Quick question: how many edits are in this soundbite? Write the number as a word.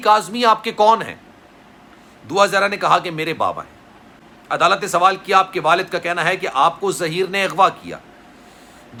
zero